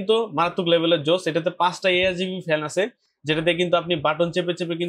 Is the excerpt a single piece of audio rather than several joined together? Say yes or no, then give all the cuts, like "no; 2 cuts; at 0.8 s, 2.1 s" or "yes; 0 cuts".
yes; 0 cuts